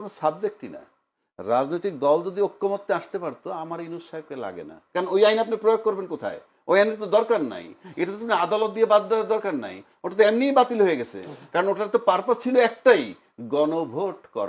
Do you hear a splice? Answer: yes; 1 cut; at 4.8 s

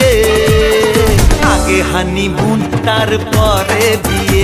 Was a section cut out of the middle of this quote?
no; 0 cuts

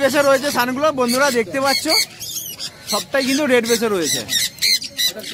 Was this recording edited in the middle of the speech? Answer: no; 0 cuts

